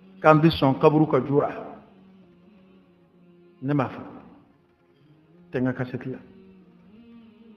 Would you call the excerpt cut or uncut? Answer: cut